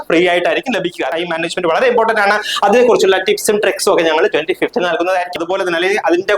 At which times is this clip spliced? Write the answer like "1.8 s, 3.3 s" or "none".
1.1 s, 5.3 s